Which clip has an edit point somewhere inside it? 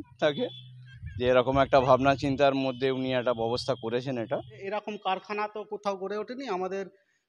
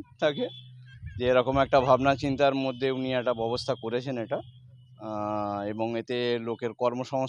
first; 1 cut; at 4.6 s

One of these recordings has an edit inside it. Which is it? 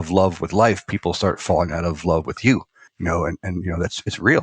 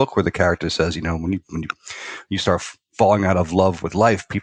first; 1 cut; at 2.9 s

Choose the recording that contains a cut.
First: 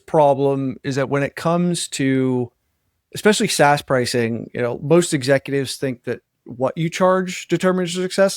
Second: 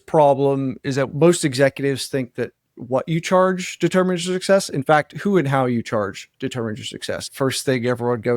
second; 2 cuts; at 1.1 s, 7.3 s

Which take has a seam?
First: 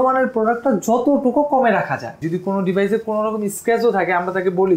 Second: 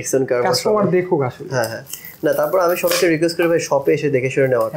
first; 1 cut; at 2.2 s

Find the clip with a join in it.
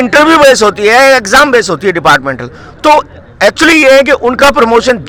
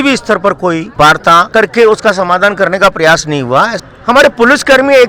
second; 1 cut; at 3.8 s

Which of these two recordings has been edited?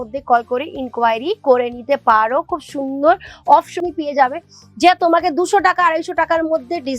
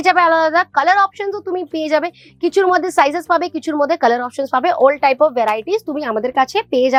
first; 1 cut; at 3.8 s

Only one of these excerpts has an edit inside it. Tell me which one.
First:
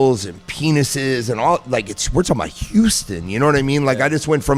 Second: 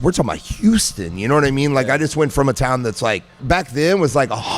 second; 1 cut; at 3.4 s

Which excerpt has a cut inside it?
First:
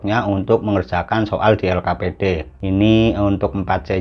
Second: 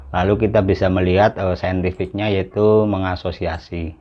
first; 1 cut; at 2.5 s

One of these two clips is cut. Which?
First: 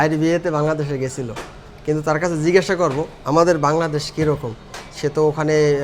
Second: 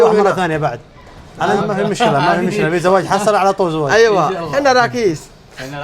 second; 1 cut; at 1.6 s

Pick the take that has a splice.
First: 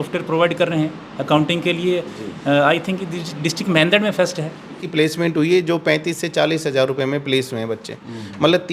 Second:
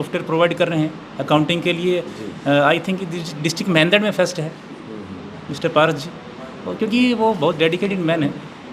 first; 1 cut; at 4.8 s

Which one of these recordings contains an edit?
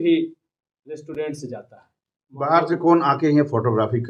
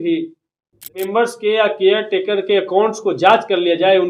second; 1 cut; at 1.1 s

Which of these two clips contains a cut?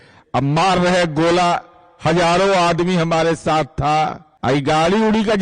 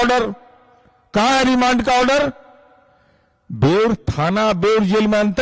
first; 1 cut; at 4.3 s

